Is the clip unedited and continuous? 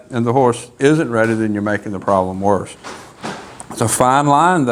yes; 0 cuts

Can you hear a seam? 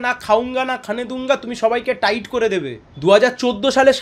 yes; 1 cut; at 2.8 s

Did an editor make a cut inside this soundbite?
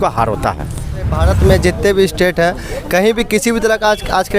yes; 1 cut; at 1.1 s

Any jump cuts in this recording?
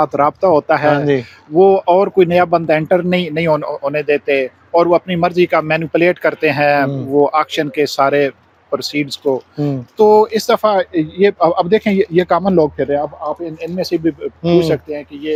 no; 0 cuts

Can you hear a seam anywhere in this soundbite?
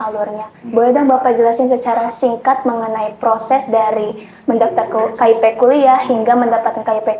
no; 0 cuts

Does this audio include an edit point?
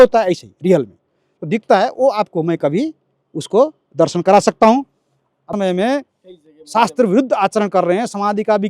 yes; 1 cut; at 5.5 s

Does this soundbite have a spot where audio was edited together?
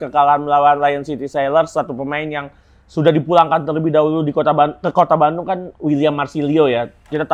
no; 0 cuts

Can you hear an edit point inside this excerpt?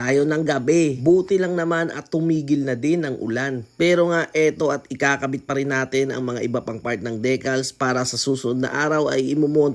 no; 0 cuts

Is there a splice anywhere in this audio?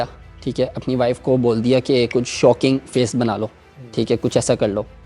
no; 0 cuts

